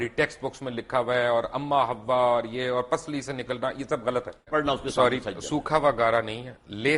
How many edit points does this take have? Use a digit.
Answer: 1